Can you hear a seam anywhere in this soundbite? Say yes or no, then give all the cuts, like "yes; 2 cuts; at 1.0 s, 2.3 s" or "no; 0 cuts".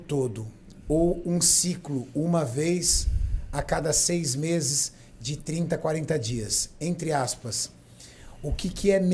no; 0 cuts